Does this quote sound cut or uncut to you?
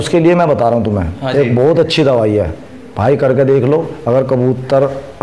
uncut